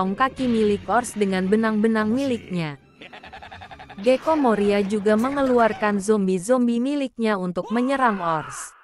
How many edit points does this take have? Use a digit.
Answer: 0